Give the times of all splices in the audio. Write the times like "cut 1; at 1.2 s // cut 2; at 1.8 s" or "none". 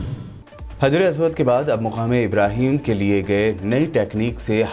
none